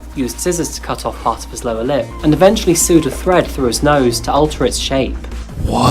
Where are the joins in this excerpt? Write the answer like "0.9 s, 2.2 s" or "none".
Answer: 2.1 s